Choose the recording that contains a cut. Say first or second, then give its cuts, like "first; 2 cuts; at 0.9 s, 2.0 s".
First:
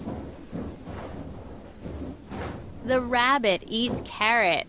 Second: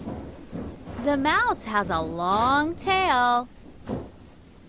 second; 2 cuts; at 0.9 s, 3.8 s